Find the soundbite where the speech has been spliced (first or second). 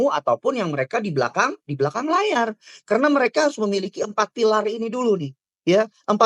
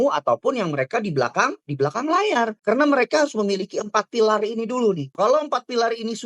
second